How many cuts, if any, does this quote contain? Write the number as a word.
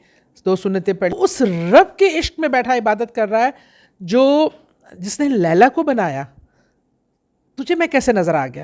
one